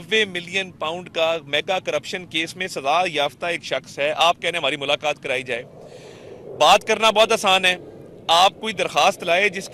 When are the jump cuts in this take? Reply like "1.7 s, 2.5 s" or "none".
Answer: none